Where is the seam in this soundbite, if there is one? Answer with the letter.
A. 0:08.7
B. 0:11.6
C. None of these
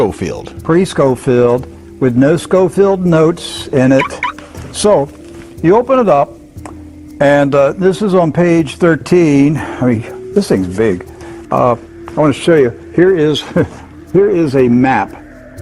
C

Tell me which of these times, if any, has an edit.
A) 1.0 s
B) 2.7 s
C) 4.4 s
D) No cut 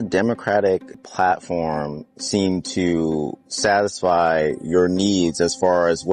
A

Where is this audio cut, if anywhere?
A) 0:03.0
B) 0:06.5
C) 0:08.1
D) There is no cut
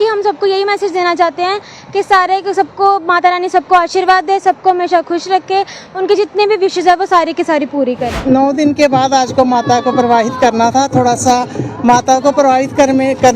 C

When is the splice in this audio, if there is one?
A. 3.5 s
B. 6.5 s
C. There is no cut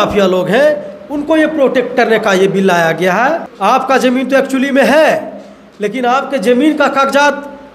A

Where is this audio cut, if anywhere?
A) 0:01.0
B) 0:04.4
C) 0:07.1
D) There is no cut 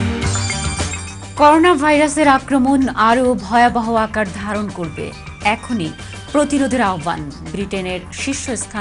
A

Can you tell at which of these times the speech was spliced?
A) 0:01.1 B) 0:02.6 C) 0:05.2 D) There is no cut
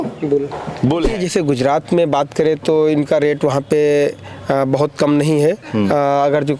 A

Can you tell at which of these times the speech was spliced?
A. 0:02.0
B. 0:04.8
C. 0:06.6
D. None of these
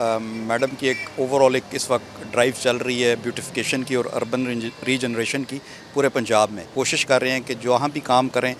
C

